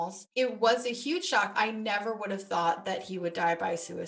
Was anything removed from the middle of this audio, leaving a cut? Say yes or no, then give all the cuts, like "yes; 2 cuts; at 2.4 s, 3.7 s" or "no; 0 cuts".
yes; 1 cut; at 1.5 s